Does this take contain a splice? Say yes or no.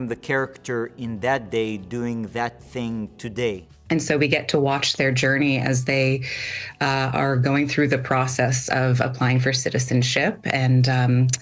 yes